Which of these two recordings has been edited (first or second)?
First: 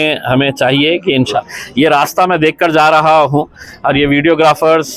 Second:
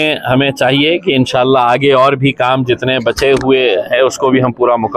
first